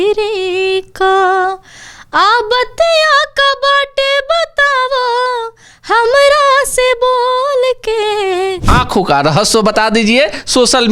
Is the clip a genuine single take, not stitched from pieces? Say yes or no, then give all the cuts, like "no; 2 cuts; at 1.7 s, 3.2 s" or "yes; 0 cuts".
no; 1 cut; at 8.7 s